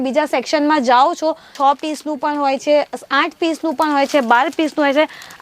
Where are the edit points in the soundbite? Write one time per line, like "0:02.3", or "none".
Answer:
0:01.5